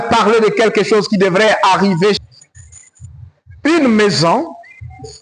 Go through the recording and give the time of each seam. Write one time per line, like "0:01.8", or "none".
0:02.2